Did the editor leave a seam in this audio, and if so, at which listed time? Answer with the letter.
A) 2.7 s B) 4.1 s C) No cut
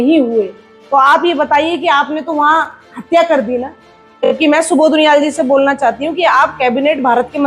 B